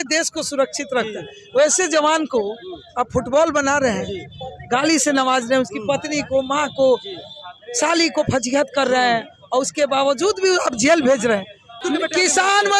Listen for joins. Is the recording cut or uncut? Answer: cut